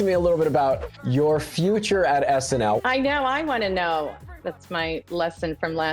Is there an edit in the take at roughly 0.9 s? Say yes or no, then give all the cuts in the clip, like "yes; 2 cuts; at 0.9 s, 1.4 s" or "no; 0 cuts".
yes; 3 cuts; at 0.9 s, 2.8 s, 4.2 s